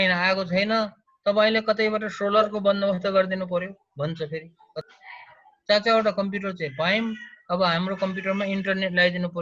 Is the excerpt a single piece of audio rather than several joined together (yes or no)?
no